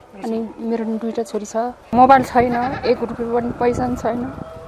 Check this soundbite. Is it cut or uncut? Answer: cut